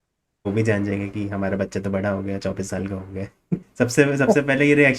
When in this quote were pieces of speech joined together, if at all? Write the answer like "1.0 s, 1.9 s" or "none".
3.6 s